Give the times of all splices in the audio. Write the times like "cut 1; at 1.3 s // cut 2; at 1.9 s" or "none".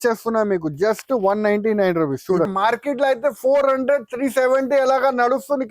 cut 1; at 2.5 s